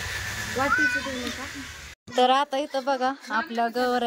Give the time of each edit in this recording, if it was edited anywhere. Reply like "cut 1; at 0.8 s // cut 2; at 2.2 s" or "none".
cut 1; at 1.9 s